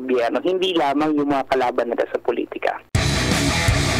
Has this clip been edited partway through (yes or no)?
yes